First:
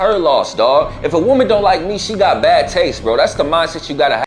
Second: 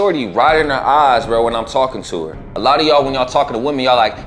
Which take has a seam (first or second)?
second